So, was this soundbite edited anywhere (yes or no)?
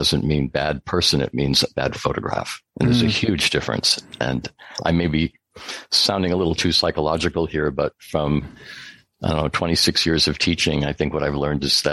no